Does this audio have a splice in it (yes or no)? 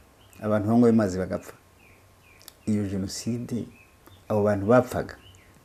no